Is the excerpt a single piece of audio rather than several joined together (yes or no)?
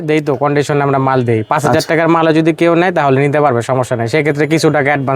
yes